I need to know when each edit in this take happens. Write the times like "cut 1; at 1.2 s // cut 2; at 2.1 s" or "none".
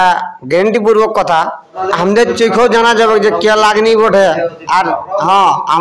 cut 1; at 1.7 s